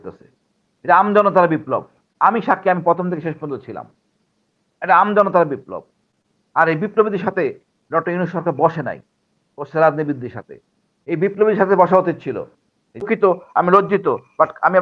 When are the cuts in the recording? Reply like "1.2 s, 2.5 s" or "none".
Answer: 13.0 s